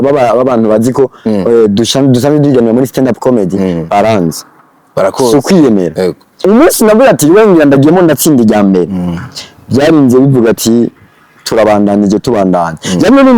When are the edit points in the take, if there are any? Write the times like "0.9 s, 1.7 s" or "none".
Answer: 6.4 s